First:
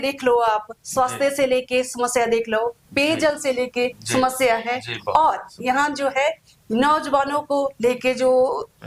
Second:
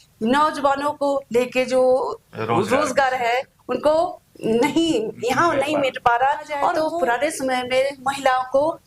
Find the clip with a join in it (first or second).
second